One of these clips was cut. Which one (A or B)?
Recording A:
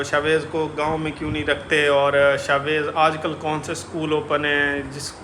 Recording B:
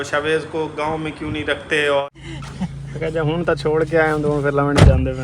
B